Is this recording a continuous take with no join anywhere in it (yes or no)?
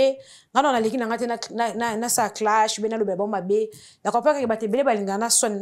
yes